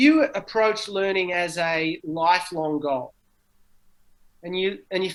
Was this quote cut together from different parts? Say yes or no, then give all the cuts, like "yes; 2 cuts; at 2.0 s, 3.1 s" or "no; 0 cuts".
no; 0 cuts